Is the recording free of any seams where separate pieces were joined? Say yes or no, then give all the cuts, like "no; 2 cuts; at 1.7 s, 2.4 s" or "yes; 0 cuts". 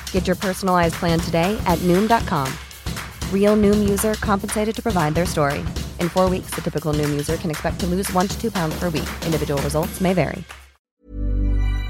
no; 1 cut; at 11.0 s